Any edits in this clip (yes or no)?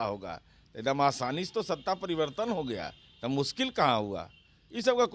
no